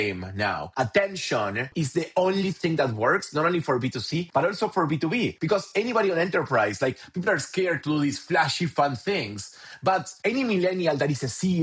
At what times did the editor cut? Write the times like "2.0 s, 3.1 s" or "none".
1.7 s